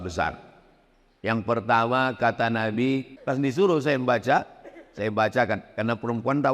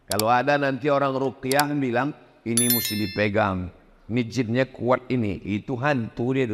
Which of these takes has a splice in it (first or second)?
first